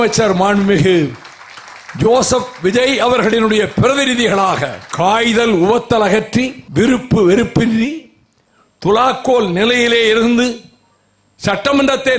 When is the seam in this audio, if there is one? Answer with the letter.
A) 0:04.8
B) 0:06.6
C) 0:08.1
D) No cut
A